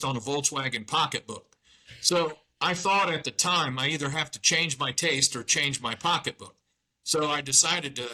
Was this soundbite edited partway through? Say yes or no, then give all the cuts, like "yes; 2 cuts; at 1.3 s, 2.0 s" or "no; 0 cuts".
no; 0 cuts